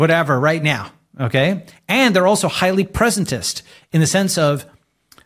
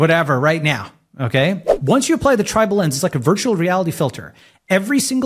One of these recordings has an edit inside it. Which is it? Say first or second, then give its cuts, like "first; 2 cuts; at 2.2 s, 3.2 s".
second; 1 cut; at 1.7 s